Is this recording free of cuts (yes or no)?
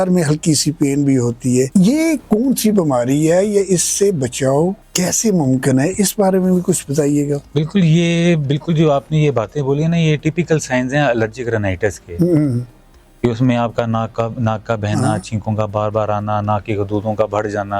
yes